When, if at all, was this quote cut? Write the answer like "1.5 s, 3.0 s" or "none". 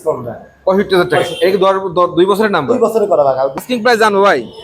3.6 s